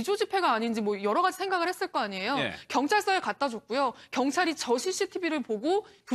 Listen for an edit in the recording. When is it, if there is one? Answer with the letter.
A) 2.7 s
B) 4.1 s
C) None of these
C